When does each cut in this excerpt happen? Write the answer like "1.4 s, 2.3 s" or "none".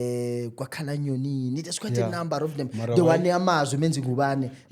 none